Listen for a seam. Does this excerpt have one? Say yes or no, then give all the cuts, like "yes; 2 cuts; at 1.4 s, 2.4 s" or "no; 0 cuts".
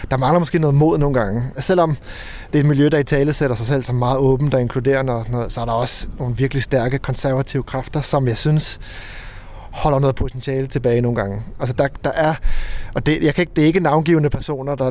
yes; 1 cut; at 1.6 s